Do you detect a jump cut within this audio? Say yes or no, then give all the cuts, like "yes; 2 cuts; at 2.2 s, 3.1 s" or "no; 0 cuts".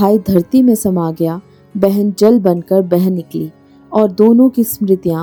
no; 0 cuts